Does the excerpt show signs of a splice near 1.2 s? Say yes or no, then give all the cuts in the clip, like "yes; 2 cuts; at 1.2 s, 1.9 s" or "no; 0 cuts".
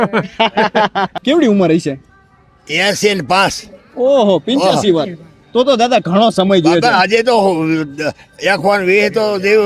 yes; 1 cut; at 1.2 s